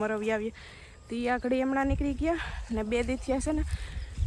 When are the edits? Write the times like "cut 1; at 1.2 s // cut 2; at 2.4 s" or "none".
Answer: none